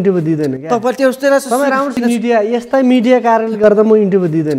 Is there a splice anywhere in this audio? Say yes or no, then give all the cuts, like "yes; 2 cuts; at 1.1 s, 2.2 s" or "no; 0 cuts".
yes; 1 cut; at 1.9 s